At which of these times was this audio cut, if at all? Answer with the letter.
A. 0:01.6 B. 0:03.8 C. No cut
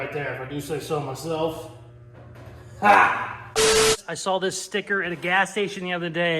B